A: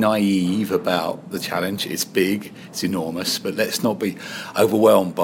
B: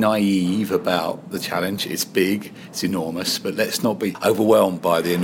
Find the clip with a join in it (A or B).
B